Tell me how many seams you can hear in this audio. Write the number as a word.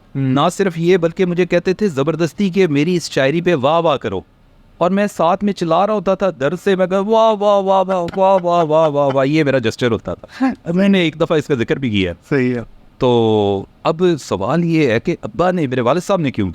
zero